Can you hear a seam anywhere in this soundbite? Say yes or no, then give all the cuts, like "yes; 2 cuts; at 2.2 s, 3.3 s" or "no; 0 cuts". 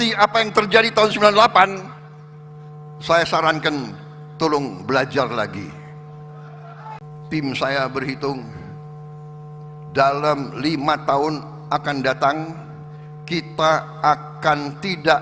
yes; 1 cut; at 7.0 s